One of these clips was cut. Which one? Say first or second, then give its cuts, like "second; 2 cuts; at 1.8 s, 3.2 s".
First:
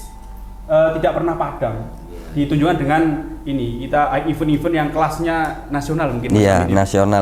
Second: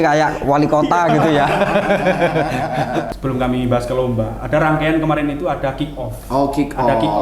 second; 1 cut; at 3.1 s